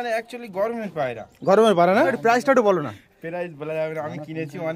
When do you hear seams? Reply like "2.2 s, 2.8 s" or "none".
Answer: 2.2 s